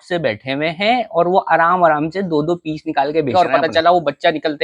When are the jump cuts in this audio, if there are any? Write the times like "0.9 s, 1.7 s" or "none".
3.3 s